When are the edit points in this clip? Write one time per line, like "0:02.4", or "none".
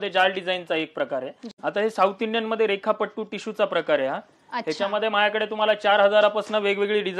0:01.4